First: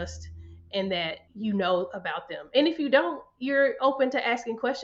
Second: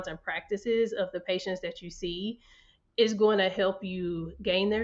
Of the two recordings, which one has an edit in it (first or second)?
first